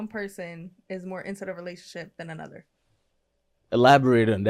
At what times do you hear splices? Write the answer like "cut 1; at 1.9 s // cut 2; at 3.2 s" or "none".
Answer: none